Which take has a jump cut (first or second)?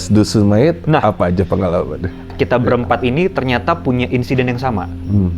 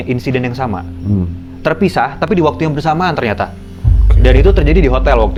first